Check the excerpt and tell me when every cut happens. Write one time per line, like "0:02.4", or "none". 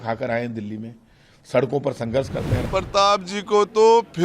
0:02.5